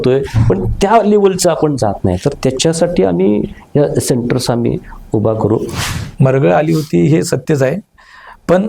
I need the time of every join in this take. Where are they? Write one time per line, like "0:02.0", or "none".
0:05.8